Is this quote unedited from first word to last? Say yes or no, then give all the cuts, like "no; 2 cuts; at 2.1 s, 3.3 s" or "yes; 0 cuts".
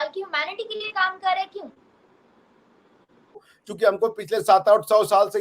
no; 1 cut; at 3.6 s